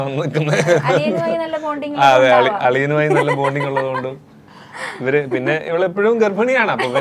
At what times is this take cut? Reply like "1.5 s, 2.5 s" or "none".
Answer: none

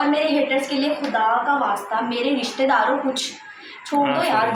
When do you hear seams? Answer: none

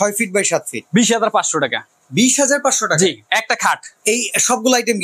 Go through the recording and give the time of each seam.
3.9 s

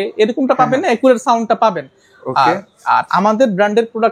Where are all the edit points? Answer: none

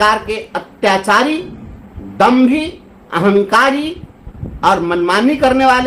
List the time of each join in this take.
none

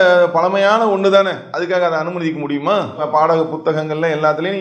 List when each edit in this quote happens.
3.0 s

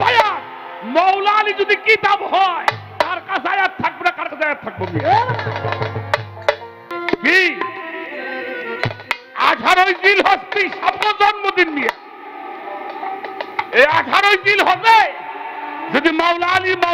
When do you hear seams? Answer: 6.8 s

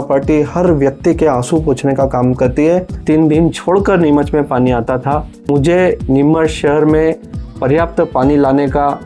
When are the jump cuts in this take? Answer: 2.9 s, 5.5 s

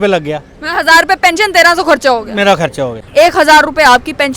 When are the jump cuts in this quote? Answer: 3.0 s

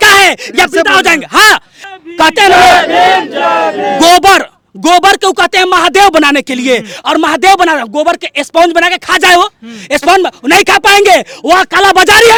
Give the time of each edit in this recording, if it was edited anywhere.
none

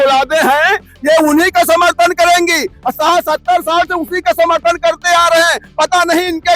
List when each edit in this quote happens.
none

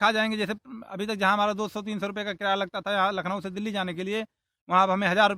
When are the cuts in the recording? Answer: none

